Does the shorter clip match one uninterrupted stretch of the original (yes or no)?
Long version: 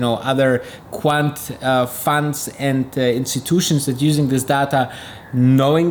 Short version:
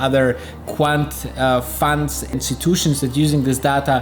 no